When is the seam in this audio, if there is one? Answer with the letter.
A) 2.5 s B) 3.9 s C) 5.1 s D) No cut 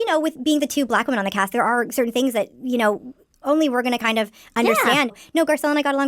C